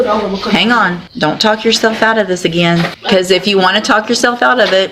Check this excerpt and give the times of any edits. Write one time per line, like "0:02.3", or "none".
0:01.0
0:03.0